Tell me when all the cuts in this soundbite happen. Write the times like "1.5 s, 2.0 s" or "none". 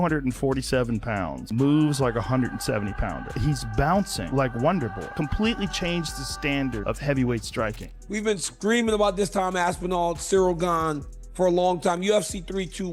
7.8 s